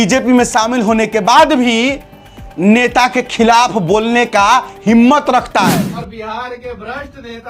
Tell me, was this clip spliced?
yes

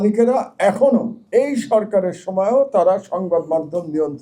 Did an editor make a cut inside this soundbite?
yes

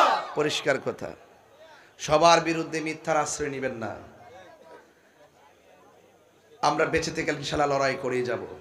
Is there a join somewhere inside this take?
no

